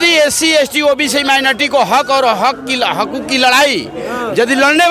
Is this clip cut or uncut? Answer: uncut